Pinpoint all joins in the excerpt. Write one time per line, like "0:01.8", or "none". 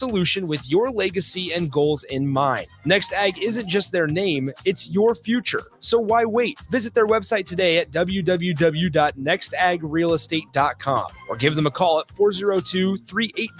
none